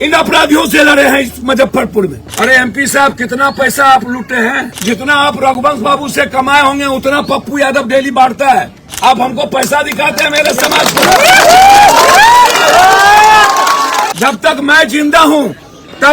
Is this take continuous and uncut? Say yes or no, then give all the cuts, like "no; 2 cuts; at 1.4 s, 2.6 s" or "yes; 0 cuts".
no; 2 cuts; at 2.2 s, 14.1 s